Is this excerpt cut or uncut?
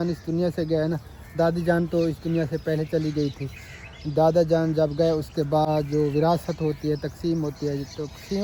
uncut